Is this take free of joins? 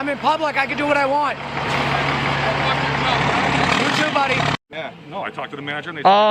no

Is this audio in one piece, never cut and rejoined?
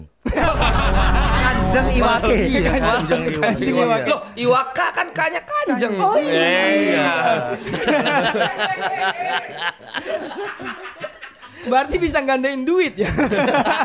yes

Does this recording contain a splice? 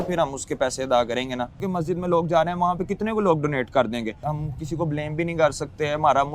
yes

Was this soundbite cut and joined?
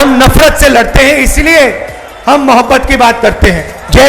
yes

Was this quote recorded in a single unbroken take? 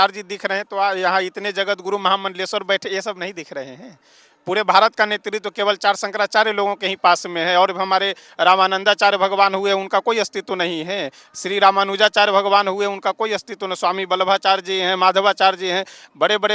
yes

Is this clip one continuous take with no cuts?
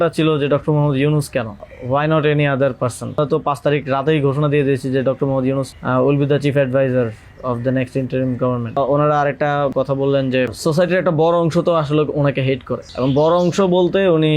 no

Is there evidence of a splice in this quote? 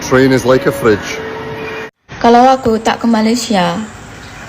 yes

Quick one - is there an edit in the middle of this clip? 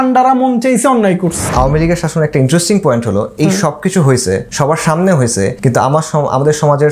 yes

